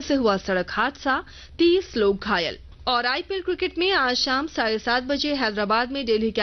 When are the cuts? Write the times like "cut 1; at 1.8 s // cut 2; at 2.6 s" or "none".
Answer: cut 1; at 2.7 s